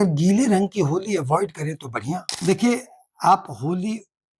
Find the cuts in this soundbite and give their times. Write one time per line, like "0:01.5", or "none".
0:02.3